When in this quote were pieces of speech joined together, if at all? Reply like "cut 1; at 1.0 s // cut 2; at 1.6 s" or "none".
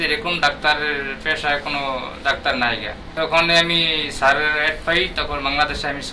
cut 1; at 3.0 s